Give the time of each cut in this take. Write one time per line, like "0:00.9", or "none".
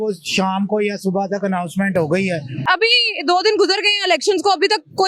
0:02.6